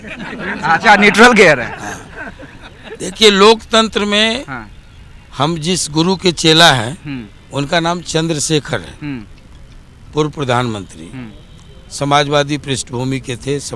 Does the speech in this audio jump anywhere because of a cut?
no; 0 cuts

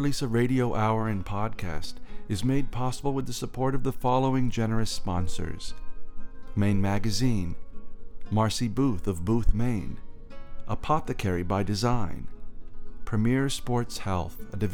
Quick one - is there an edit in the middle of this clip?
no; 0 cuts

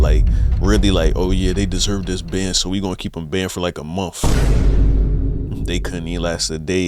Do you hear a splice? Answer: no; 0 cuts

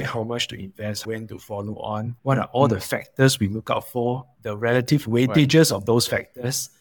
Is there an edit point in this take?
yes; 1 cut; at 1.0 s

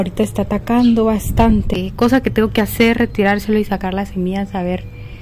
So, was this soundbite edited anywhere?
yes; 1 cut; at 1.8 s

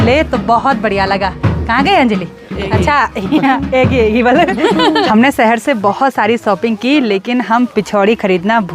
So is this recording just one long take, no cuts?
no; 1 cut; at 5.1 s

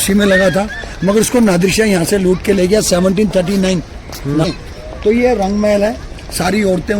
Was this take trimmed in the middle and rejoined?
yes; 1 cut; at 4.4 s

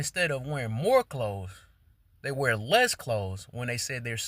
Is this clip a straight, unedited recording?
no; 1 cut; at 3.4 s

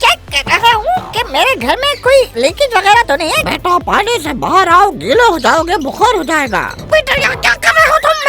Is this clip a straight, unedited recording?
no; 2 cuts; at 3.4 s, 6.8 s

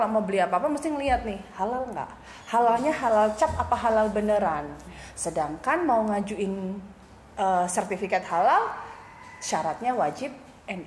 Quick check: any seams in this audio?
no; 0 cuts

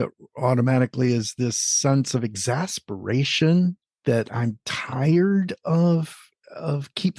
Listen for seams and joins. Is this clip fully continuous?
yes; 0 cuts

